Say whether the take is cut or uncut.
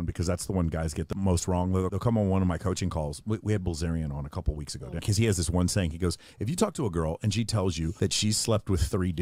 cut